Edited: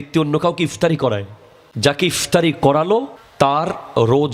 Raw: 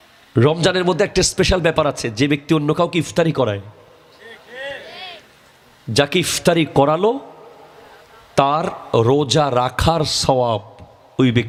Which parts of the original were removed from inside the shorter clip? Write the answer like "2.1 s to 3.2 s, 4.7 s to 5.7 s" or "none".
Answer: 3.3 s to 5.1 s, 7.3 s to 8.2 s